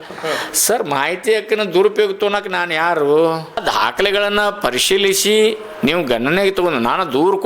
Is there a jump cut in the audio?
yes; 1 cut; at 3.6 s

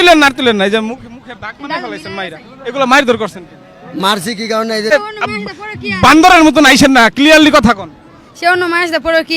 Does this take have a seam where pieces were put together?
yes; 1 cut; at 4.9 s

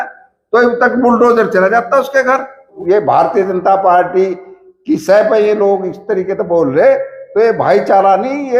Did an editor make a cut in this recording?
yes; 1 cut; at 2.7 s

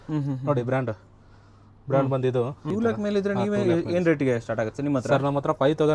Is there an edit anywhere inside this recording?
yes; 1 cut; at 2.6 s

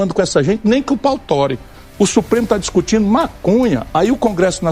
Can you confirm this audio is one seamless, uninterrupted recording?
no; 1 cut; at 1.7 s

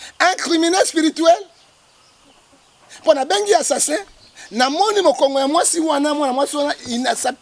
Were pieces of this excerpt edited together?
no; 0 cuts

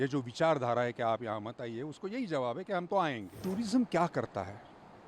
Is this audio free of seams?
no; 1 cut; at 3.4 s

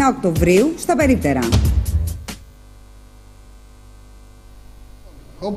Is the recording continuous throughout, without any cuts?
yes; 0 cuts

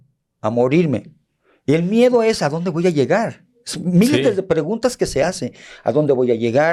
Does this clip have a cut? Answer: no; 0 cuts

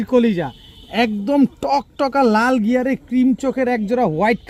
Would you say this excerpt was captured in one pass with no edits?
yes; 0 cuts

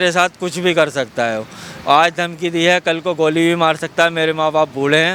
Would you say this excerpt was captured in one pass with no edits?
yes; 0 cuts

